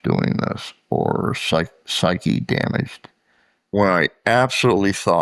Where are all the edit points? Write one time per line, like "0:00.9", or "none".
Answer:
0:03.6